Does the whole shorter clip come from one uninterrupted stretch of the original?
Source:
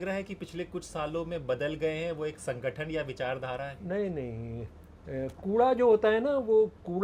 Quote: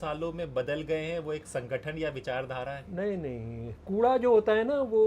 no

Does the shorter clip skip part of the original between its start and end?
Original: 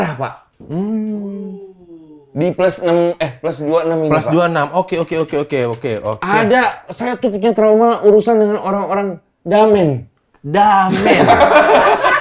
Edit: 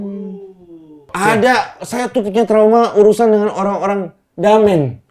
yes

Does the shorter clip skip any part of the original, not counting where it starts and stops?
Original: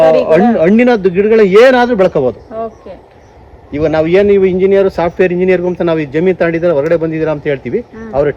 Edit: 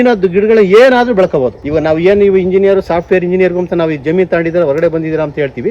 yes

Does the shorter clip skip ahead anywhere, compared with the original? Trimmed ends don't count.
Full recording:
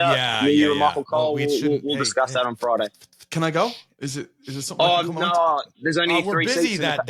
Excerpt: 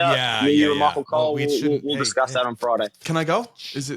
yes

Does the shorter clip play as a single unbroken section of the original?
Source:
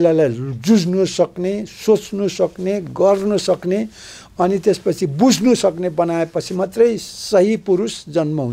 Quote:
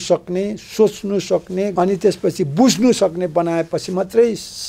no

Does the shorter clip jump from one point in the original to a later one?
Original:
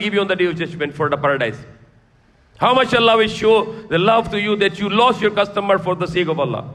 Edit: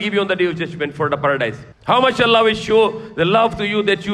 yes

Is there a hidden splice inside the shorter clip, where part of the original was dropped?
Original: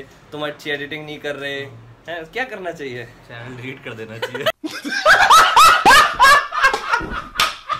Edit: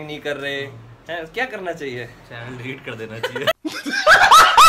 no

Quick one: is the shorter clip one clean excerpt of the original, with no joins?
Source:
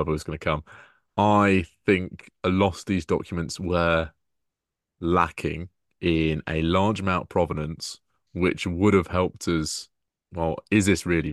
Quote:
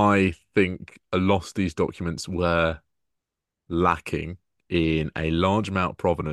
yes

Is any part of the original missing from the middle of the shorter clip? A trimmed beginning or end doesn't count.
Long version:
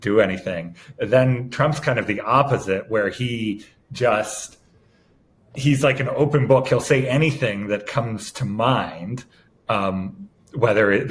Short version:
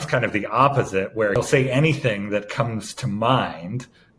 yes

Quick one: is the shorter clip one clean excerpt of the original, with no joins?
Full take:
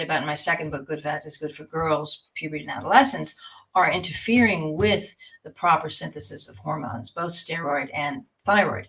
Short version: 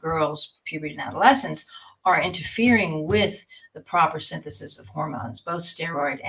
yes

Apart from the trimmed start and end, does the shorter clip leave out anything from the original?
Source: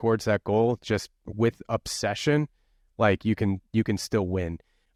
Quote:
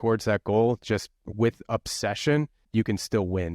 yes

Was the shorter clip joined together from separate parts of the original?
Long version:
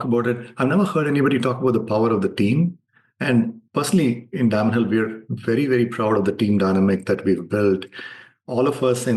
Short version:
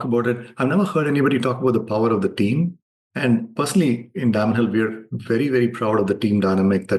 yes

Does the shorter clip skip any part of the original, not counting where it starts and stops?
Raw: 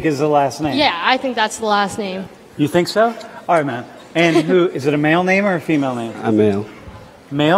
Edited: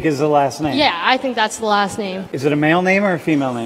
yes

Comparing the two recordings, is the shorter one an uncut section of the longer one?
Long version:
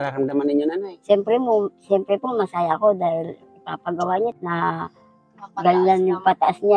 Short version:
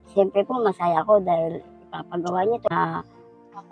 no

